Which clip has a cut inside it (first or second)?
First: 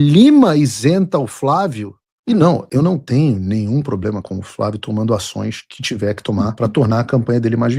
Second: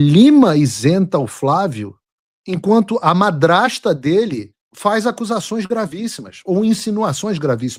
first